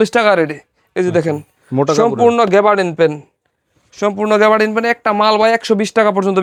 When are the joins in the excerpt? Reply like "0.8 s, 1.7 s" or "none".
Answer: none